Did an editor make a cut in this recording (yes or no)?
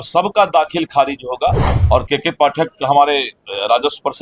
yes